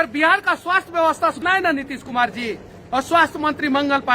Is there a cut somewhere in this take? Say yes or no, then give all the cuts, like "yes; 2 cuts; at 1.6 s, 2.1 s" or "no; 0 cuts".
yes; 1 cut; at 1.4 s